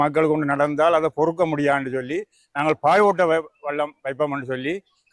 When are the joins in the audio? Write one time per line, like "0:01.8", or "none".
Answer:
none